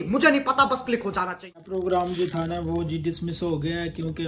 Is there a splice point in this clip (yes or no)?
yes